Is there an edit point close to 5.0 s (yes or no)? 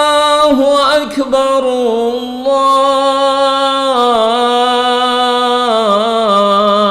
no